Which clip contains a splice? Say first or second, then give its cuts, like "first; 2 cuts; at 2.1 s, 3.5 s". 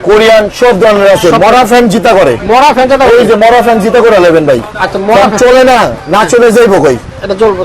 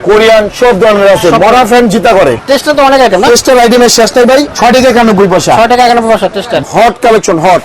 second; 3 cuts; at 2.4 s, 4.5 s, 6.6 s